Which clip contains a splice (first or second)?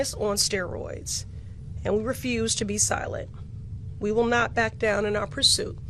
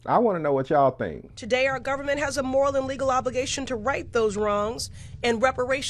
second